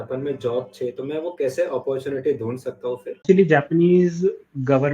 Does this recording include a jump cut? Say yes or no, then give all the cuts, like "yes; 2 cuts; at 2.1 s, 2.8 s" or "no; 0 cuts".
yes; 1 cut; at 3.2 s